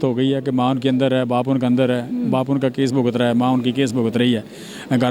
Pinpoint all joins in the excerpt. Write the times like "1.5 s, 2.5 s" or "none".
none